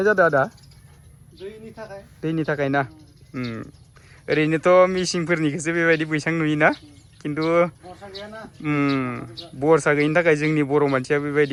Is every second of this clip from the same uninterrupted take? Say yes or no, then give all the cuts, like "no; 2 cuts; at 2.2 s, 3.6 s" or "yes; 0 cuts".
yes; 0 cuts